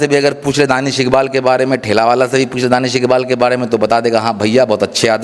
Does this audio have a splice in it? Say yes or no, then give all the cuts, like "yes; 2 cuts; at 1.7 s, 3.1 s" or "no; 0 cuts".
no; 0 cuts